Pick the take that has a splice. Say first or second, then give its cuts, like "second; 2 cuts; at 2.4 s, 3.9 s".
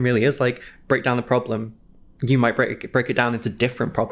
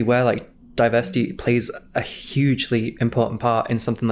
second; 1 cut; at 2.2 s